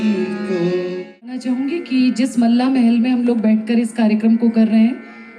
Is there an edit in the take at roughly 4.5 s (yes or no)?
no